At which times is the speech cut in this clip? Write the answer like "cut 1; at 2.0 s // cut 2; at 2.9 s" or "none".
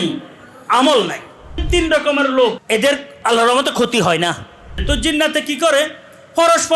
cut 1; at 1.6 s // cut 2; at 2.6 s // cut 3; at 4.8 s